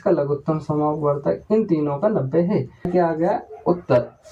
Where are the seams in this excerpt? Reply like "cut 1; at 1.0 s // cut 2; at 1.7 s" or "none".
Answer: cut 1; at 2.9 s